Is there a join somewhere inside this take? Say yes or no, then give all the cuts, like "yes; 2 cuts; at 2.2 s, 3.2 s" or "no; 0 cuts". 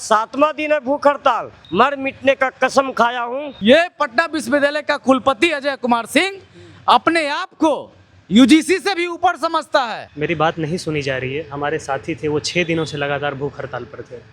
yes; 3 cuts; at 1.5 s, 3.5 s, 10.0 s